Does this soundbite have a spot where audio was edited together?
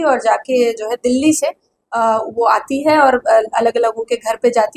no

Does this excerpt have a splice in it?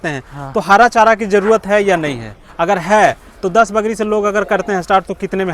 no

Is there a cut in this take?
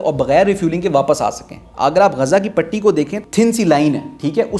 yes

